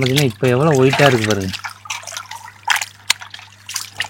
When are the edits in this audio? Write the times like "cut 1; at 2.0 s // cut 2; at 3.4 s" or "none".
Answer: none